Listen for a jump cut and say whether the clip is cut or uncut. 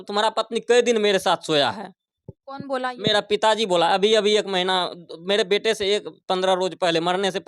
uncut